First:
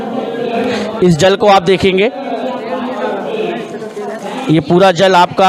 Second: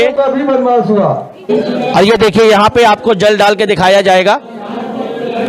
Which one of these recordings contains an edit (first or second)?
second